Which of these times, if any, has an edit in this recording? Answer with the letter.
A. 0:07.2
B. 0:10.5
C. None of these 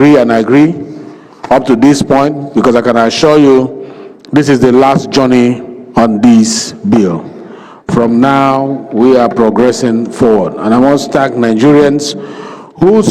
C